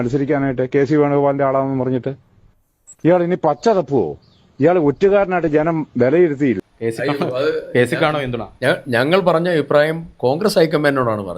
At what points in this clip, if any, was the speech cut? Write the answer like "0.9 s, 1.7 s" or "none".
6.6 s